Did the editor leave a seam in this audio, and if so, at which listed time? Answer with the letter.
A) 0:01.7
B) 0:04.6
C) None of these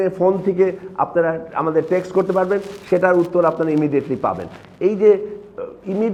C